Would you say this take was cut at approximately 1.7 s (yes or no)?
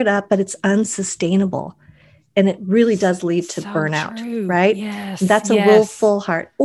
no